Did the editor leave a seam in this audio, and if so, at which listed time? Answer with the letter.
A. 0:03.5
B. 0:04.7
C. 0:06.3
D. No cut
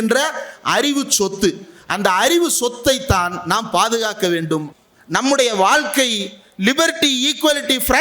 B